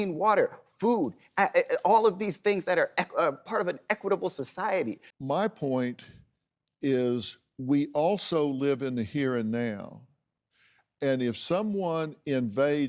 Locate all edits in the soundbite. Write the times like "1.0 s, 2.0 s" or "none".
5.0 s